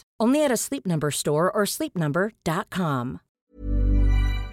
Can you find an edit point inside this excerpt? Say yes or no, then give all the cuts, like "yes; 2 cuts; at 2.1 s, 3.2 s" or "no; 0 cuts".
yes; 1 cut; at 3.3 s